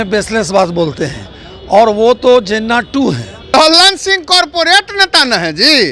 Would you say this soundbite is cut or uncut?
cut